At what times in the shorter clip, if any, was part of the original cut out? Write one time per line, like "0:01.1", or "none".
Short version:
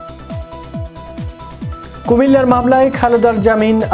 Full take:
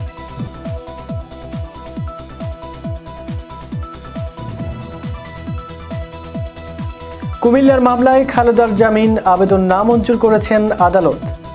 0:02.0